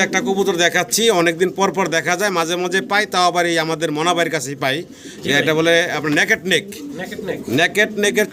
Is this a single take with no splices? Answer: yes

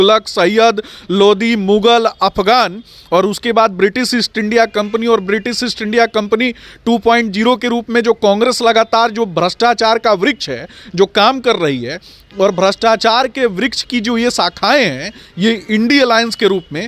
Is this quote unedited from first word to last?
yes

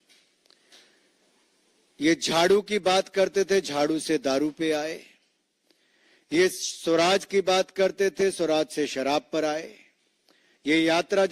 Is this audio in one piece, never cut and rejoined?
yes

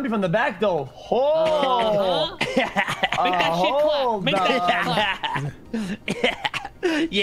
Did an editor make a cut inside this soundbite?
no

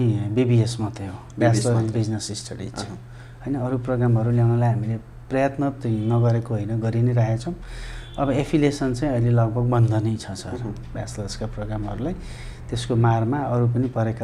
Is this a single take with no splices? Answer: yes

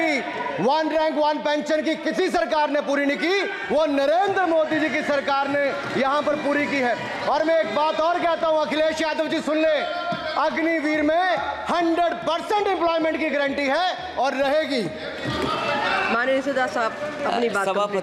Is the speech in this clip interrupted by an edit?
no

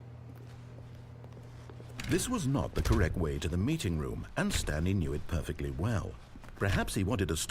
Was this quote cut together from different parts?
yes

